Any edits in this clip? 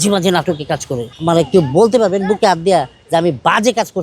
yes; 1 cut; at 1.1 s

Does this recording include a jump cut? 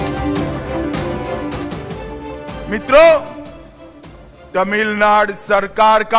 yes; 2 cuts; at 1.5 s, 2.1 s

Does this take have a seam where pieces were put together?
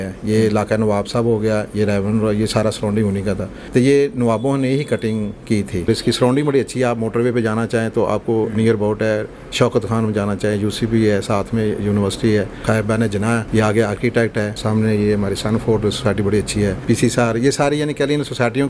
yes; 5 cuts; at 3.5 s, 5.9 s, 13.0 s, 14.6 s, 16.8 s

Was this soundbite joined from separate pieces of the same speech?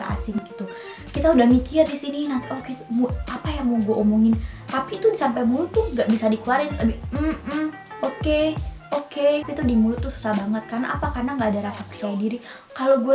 yes; 1 cut; at 9.5 s

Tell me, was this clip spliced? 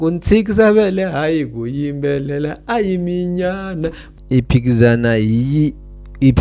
yes; 1 cut; at 4.1 s

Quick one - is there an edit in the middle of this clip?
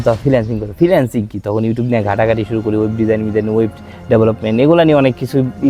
no; 0 cuts

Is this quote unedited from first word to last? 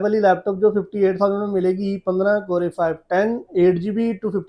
yes; 0 cuts

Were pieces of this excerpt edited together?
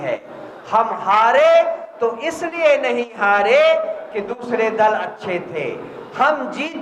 no; 0 cuts

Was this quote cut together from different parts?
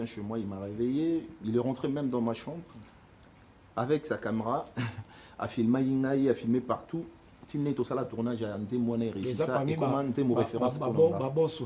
no; 0 cuts

